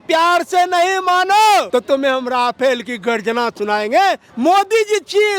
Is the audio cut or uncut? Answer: cut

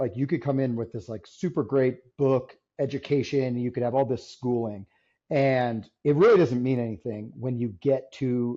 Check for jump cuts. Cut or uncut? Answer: uncut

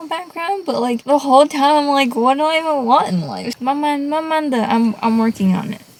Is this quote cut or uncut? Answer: uncut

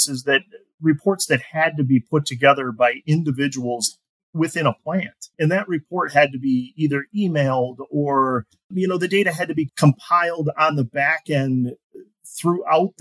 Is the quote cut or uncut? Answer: cut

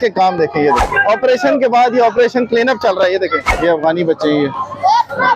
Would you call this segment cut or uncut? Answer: cut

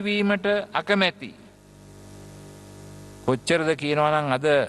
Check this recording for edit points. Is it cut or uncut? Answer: uncut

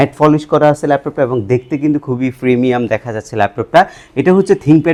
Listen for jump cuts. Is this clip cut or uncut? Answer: uncut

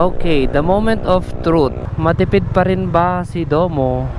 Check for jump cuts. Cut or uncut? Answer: cut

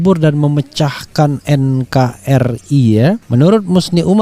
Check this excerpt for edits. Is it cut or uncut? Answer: cut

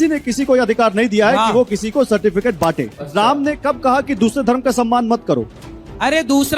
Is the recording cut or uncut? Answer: cut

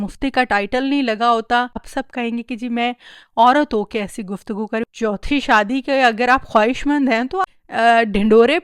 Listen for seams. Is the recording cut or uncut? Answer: cut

